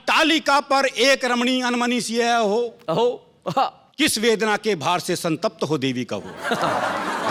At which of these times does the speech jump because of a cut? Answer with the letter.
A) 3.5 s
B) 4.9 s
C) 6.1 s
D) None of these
D